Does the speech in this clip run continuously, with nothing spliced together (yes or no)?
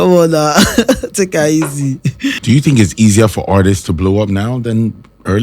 no